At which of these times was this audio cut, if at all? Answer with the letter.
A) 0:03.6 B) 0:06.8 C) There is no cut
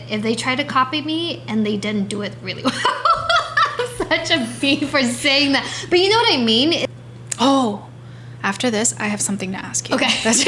B